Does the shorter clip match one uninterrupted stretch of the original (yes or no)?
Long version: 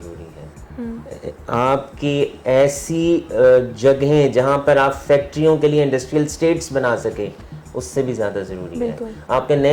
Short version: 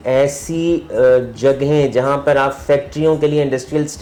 yes